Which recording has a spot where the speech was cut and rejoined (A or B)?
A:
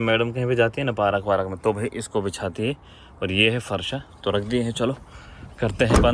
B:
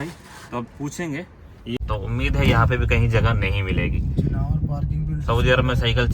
B